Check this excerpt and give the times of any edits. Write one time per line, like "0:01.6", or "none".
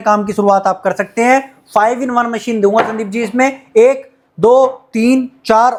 none